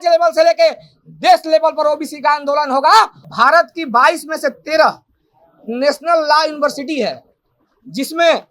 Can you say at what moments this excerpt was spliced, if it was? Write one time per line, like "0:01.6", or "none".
0:03.2